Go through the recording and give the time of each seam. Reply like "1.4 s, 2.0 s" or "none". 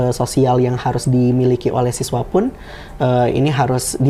none